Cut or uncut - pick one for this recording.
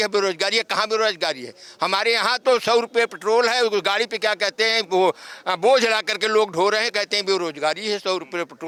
uncut